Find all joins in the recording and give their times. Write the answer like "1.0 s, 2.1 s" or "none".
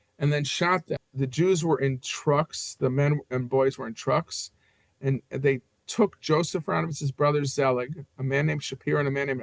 1.1 s